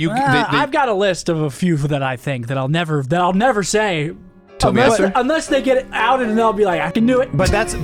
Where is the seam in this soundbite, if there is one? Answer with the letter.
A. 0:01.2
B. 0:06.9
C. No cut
B